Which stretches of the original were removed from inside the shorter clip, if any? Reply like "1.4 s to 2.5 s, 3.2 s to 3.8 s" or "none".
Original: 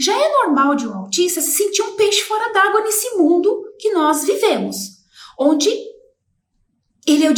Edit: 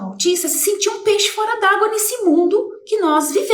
none